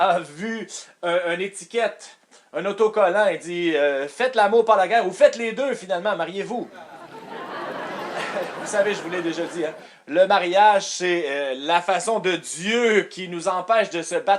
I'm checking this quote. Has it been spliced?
no; 0 cuts

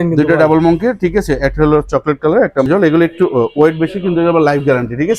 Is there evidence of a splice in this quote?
yes; 1 cut; at 2.7 s

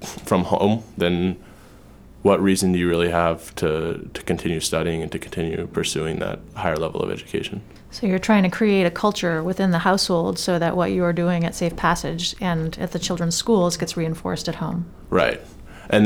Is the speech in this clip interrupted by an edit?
no; 0 cuts

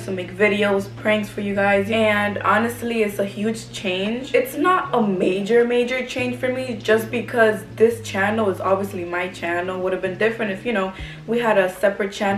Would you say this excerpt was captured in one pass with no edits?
yes; 0 cuts

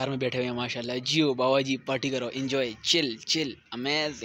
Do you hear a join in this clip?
no; 0 cuts

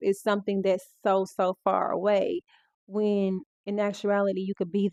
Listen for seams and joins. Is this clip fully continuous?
yes; 0 cuts

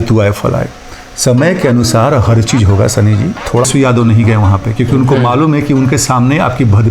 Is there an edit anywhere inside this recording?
yes; 1 cut; at 3.7 s

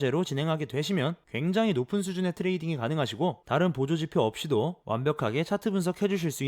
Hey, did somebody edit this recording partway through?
yes; 3 cuts; at 1.2 s, 3.4 s, 4.8 s

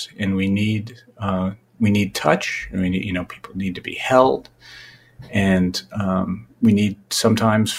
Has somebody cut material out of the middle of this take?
no; 0 cuts

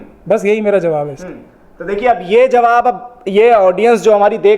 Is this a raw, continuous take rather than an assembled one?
yes; 0 cuts

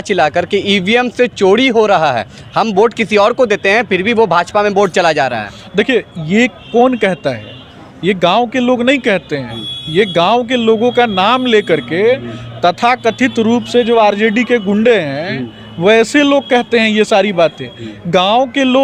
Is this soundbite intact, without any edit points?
yes; 0 cuts

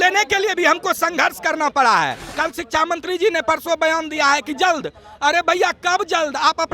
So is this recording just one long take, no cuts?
no; 1 cut; at 2.2 s

